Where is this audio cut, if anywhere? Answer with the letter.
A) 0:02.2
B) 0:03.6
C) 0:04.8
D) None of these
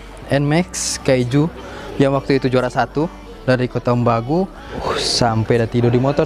C